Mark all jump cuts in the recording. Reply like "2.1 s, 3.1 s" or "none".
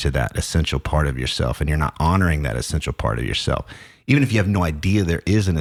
none